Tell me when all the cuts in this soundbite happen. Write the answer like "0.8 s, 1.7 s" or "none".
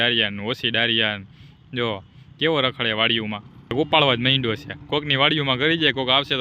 3.7 s